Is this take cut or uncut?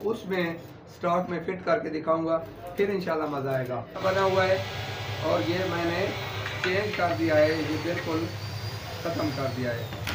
cut